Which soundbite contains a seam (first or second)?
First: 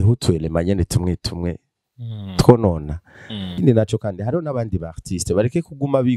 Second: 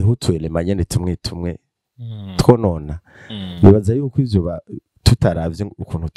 first